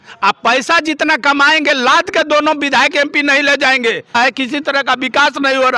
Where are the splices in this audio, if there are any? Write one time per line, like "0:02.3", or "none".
0:04.2

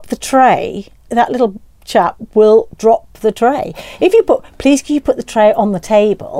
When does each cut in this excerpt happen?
0:01.0

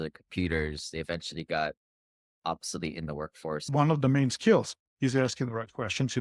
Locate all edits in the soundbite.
0:03.7

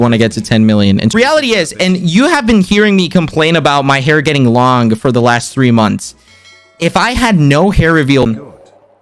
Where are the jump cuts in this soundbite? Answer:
0:01.1
0:08.2

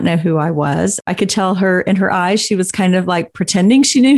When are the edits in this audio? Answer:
0:01.0

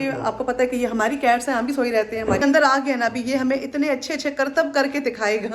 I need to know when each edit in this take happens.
0:02.4

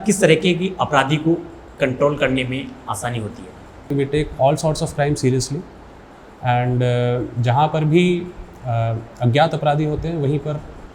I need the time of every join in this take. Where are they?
0:03.9

